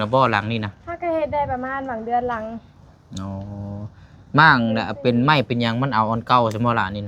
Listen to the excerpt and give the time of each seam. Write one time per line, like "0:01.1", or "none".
none